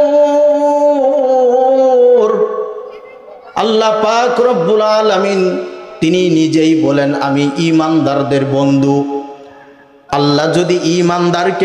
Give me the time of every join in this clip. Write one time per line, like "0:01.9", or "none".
none